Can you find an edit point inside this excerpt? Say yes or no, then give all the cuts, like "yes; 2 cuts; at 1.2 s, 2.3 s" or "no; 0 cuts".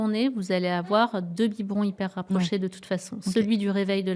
no; 0 cuts